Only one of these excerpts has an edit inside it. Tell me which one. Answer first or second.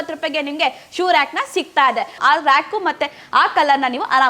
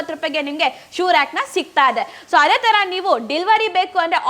first